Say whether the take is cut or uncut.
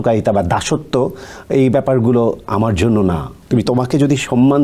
cut